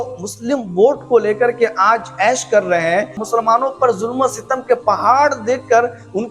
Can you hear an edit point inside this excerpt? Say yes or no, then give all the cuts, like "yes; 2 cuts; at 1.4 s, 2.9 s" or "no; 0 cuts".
yes; 1 cut; at 3.2 s